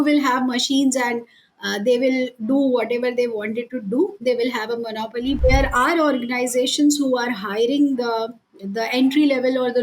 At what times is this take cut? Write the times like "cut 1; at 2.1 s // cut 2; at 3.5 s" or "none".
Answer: cut 1; at 5.4 s